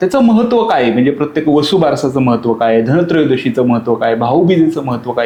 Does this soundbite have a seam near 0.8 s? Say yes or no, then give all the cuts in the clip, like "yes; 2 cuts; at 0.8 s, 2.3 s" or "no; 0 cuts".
no; 0 cuts